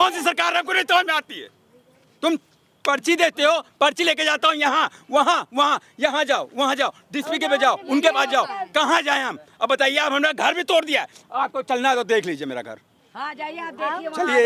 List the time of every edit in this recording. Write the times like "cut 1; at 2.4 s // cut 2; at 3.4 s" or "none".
none